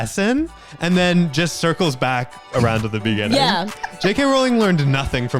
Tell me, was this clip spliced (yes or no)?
no